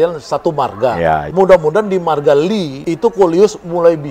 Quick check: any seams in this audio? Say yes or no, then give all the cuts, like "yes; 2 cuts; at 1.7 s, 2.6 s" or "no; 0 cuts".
yes; 2 cuts; at 1.3 s, 2.8 s